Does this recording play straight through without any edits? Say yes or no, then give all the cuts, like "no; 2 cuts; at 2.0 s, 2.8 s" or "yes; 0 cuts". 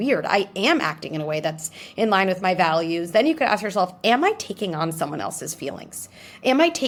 yes; 0 cuts